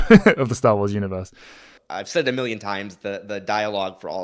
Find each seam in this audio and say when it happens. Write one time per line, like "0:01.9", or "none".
0:01.2